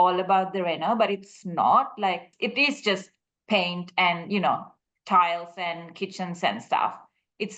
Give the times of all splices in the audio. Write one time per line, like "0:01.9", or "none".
0:02.3